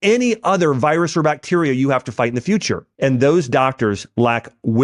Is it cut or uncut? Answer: cut